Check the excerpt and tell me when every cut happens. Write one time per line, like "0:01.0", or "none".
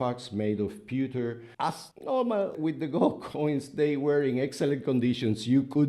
0:01.5